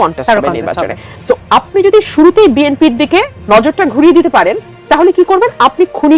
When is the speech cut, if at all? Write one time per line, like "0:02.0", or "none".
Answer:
0:03.3